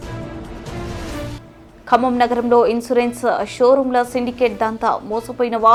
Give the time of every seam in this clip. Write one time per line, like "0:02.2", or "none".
none